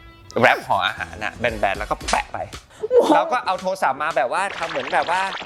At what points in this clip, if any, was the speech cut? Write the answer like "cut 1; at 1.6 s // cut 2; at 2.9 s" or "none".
cut 1; at 2.7 s